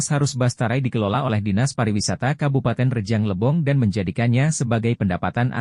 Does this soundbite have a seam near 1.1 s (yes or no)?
no